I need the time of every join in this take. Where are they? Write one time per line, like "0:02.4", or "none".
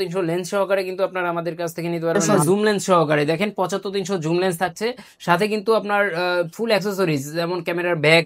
0:02.2